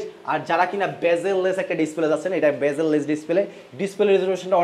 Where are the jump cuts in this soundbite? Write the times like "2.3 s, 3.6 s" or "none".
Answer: none